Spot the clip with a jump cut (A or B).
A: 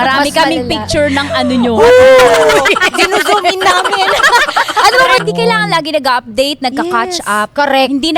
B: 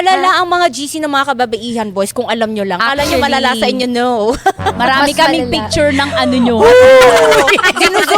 A